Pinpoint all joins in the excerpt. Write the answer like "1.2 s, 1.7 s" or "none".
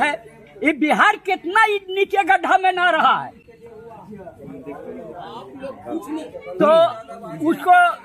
3.0 s